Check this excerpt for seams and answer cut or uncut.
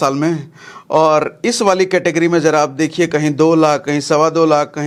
uncut